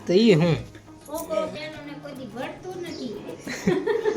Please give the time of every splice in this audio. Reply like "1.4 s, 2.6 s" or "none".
1.5 s